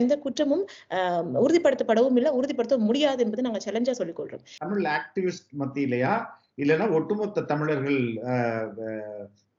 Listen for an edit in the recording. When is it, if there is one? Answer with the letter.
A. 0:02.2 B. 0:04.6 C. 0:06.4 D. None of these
B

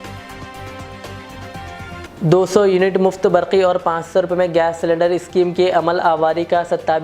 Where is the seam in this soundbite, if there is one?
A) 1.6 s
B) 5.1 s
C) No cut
A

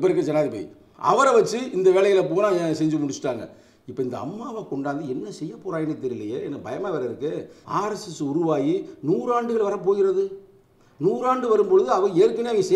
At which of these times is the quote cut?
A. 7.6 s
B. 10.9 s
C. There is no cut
A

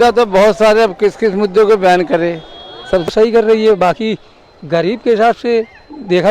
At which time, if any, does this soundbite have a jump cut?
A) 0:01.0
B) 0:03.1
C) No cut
B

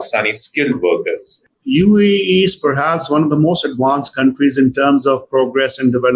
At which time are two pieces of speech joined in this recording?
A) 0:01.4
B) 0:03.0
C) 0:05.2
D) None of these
A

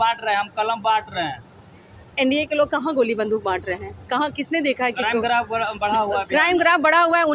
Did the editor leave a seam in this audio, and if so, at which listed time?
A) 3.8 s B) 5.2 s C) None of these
C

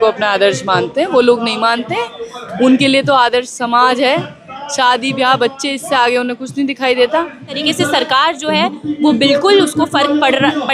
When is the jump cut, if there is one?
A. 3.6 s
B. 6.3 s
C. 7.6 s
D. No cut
C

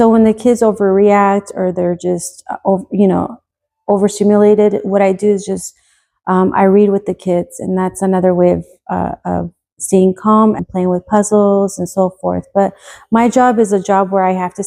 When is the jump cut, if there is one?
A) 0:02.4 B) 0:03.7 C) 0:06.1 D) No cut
D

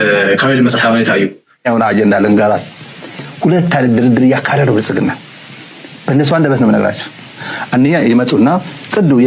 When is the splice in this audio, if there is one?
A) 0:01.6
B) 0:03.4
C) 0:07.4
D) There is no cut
A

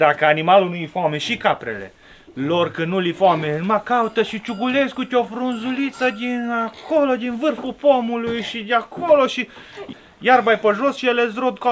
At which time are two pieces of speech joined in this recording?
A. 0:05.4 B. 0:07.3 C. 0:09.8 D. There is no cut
C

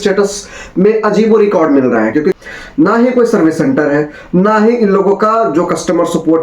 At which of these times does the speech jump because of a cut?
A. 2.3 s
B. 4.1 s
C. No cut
A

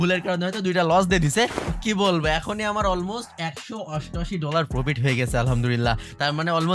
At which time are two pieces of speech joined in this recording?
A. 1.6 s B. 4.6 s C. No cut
A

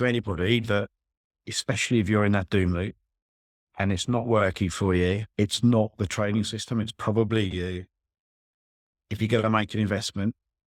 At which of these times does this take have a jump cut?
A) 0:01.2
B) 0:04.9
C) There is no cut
C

